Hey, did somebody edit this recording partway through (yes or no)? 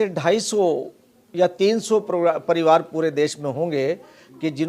no